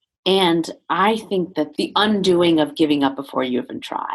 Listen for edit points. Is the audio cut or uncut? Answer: cut